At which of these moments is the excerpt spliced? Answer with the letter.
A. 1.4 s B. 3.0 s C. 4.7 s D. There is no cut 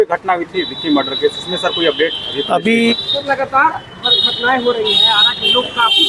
B